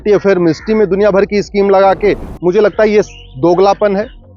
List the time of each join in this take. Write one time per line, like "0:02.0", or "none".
0:02.3